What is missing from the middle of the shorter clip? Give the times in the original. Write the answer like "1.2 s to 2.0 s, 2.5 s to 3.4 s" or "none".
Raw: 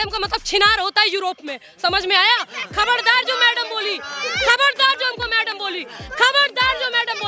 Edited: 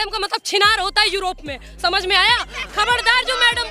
none

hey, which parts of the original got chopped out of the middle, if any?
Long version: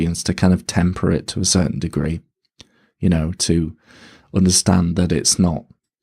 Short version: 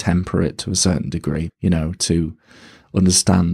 2.2 s to 2.9 s

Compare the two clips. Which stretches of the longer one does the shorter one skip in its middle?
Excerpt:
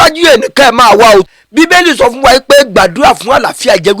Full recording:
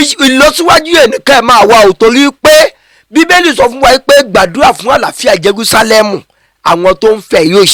2.0 s to 2.8 s

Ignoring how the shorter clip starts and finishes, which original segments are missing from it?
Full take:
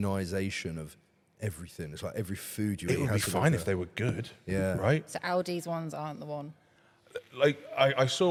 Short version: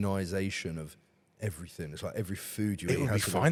none

